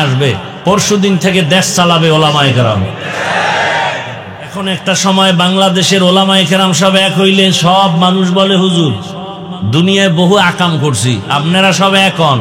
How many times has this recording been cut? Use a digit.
1